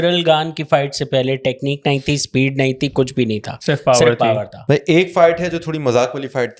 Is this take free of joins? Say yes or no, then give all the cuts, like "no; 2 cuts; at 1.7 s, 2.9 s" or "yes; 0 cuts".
no; 1 cut; at 4.5 s